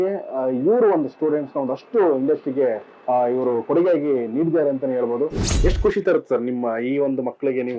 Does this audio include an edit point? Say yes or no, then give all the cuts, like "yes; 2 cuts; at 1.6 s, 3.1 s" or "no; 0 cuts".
yes; 1 cut; at 5.5 s